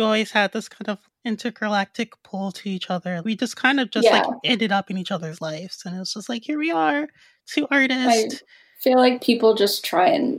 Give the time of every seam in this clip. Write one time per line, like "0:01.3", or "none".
0:01.0
0:03.2